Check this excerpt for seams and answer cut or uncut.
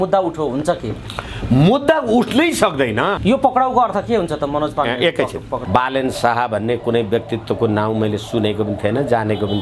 cut